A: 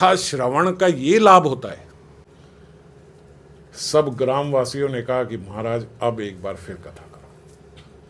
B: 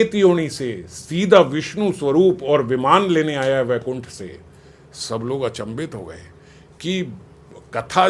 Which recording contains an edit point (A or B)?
A